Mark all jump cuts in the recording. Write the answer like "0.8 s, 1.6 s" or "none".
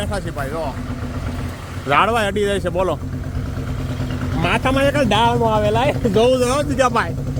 none